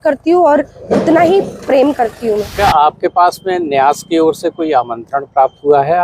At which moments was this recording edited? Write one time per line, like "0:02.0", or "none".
0:02.5

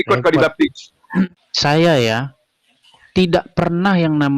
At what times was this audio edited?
0:01.3

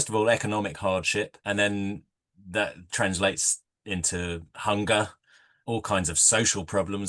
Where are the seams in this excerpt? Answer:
0:01.4
0:05.5

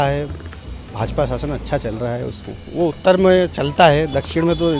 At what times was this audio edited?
0:02.4

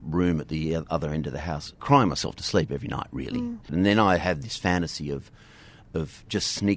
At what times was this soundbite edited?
0:01.7
0:03.7

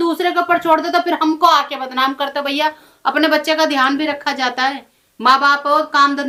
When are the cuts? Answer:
none

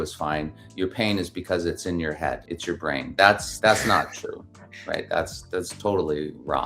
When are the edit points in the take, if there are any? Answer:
0:02.5
0:03.5

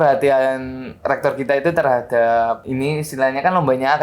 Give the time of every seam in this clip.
0:02.6

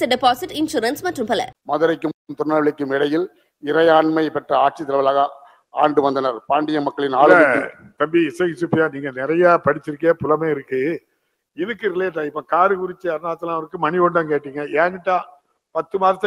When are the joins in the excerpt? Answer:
0:01.5

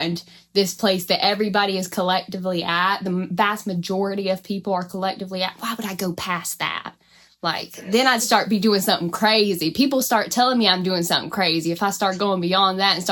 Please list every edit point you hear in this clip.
none

